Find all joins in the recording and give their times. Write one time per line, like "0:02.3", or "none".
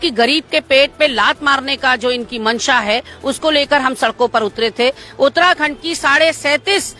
none